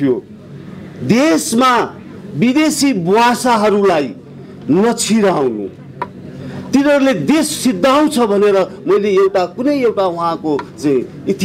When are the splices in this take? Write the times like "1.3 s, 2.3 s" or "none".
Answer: none